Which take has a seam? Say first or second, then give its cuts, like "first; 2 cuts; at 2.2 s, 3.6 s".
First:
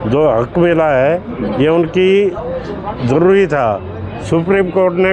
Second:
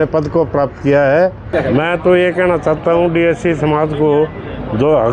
second; 1 cut; at 1.4 s